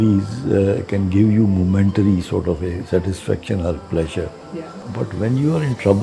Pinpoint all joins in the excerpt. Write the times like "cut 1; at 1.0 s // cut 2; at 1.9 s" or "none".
cut 1; at 4.8 s